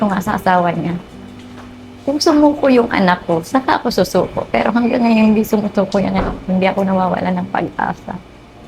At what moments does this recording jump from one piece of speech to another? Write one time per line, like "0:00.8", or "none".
none